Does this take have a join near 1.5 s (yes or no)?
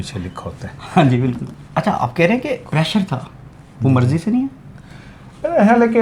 yes